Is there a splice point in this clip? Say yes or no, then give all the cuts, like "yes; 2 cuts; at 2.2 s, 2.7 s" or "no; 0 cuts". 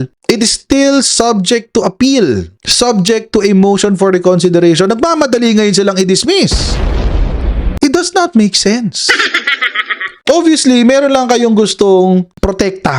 no; 0 cuts